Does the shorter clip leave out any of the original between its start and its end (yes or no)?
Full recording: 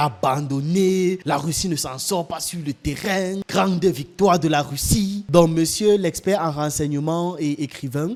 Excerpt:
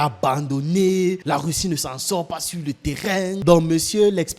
yes